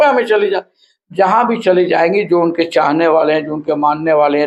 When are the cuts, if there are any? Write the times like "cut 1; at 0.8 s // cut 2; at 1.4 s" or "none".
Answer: none